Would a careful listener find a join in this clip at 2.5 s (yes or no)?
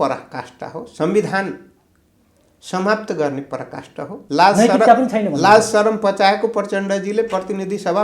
no